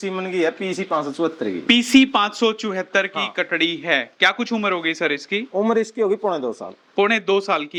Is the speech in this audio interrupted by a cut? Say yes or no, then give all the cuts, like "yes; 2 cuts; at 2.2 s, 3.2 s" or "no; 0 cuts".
no; 0 cuts